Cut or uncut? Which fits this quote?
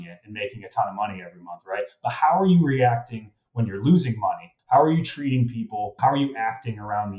cut